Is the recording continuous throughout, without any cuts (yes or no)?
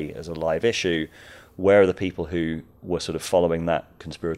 yes